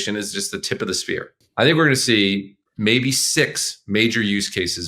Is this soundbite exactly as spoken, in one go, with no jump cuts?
no; 1 cut; at 1.4 s

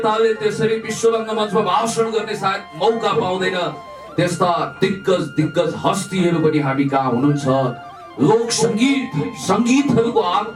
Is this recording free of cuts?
yes; 0 cuts

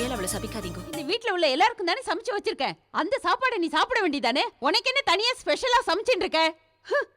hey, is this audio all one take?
no; 1 cut; at 1.0 s

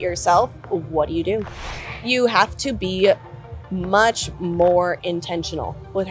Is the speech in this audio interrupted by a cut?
yes; 1 cut; at 1.9 s

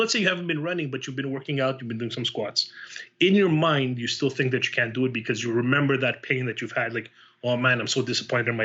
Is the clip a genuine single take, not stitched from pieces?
yes; 0 cuts

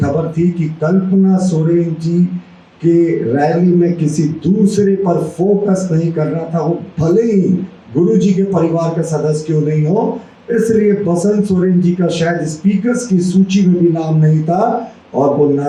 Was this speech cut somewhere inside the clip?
no; 0 cuts

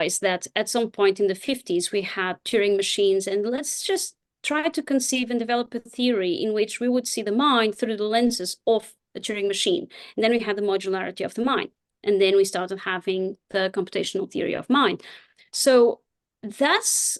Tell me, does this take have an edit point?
no; 0 cuts

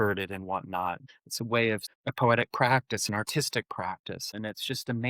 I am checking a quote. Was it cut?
yes; 3 cuts; at 1.1 s, 1.9 s, 4.3 s

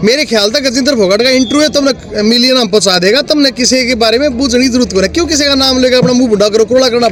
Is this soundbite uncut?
yes; 0 cuts

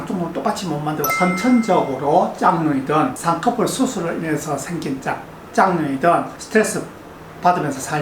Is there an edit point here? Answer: yes; 1 cut; at 1.1 s

